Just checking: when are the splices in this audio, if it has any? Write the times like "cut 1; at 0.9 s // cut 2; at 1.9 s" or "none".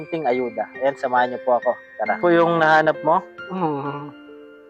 cut 1; at 2.2 s